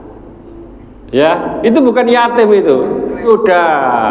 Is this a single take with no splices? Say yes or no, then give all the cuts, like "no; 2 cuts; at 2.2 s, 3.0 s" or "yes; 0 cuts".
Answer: no; 1 cut; at 3.2 s